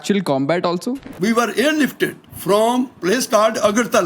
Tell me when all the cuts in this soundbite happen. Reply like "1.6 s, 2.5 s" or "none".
0.8 s, 2.3 s